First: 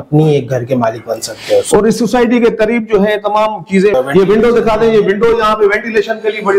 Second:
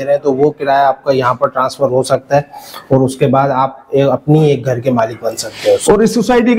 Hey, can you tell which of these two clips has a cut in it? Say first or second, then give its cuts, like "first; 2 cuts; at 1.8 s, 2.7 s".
first; 1 cut; at 3.9 s